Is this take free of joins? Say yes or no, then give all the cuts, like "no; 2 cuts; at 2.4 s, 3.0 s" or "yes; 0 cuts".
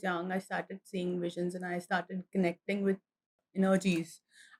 yes; 0 cuts